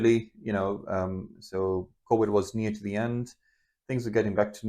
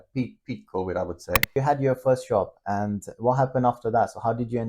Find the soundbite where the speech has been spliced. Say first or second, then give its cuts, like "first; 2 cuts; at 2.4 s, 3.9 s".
second; 1 cut; at 1.5 s